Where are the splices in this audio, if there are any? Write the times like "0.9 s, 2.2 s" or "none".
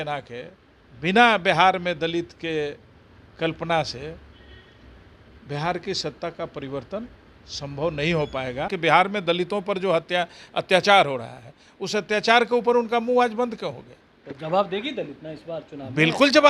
8.7 s